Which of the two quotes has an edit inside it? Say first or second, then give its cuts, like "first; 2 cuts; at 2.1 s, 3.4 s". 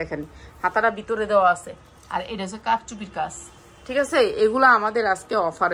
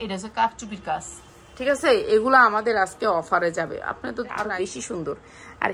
second; 1 cut; at 4.4 s